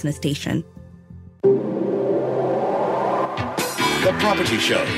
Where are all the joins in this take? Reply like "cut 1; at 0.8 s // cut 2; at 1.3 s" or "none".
cut 1; at 1.0 s